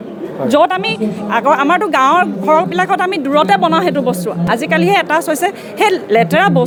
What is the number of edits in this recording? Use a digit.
0